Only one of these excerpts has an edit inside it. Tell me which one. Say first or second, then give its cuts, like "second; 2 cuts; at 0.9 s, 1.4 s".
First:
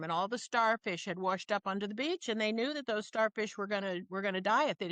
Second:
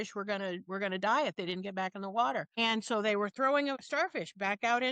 second; 2 cuts; at 2.5 s, 3.8 s